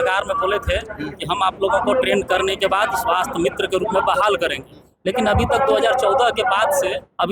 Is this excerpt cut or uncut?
uncut